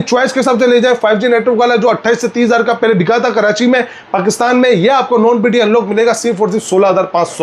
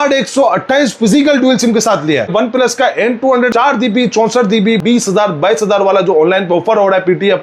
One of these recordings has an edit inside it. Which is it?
second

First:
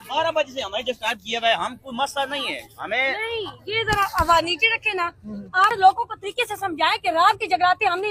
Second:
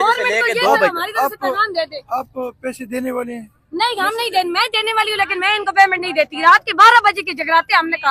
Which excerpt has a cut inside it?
first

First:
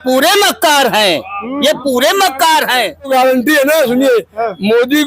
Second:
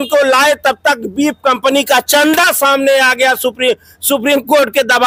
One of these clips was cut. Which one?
first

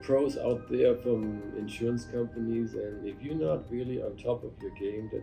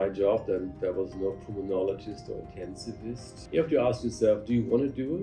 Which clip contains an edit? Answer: second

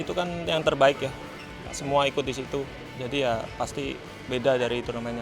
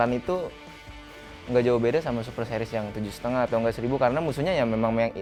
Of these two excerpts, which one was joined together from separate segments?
first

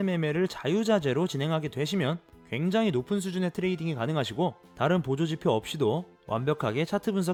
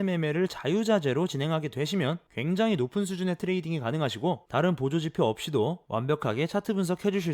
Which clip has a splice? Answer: second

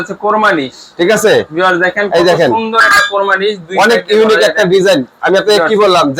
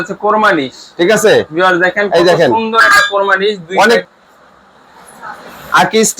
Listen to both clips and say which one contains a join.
second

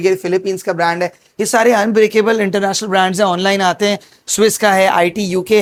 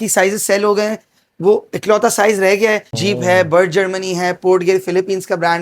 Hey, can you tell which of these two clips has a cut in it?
second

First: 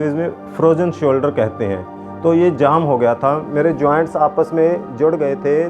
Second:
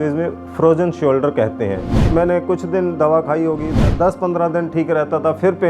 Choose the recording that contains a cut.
second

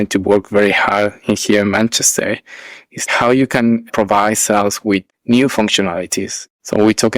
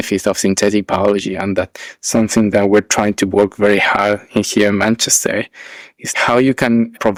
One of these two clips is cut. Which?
first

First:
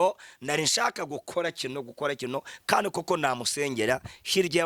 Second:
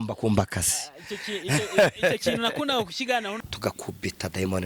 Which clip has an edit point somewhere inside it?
second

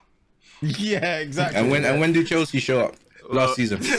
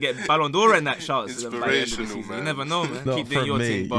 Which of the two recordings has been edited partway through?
second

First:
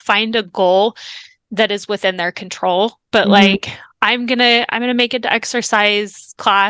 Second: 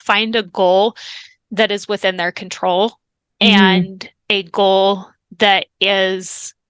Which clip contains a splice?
first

